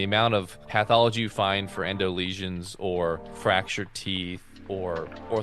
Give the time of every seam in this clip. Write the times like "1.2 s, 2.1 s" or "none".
3.3 s, 4.7 s